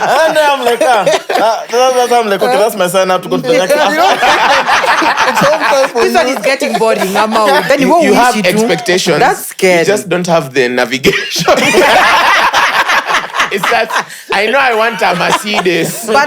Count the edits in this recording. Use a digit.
1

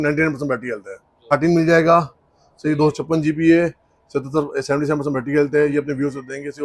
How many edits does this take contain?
1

